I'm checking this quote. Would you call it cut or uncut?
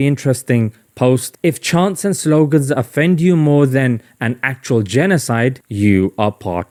uncut